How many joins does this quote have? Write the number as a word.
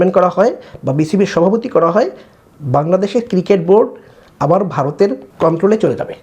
one